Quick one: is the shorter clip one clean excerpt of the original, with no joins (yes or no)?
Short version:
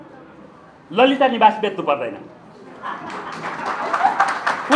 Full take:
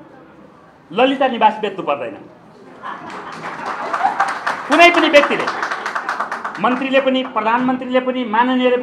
yes